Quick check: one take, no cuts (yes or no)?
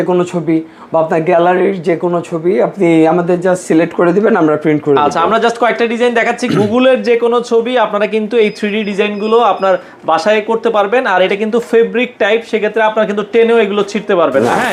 yes